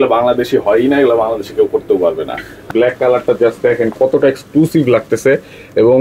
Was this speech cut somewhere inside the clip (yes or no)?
yes